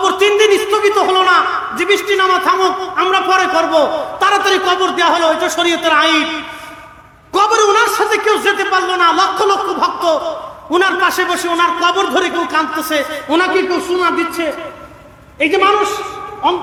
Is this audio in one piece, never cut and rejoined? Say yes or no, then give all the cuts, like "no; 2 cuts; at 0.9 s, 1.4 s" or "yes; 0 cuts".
yes; 0 cuts